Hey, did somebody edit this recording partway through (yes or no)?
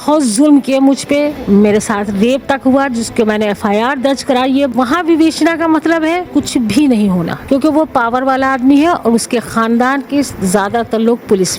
yes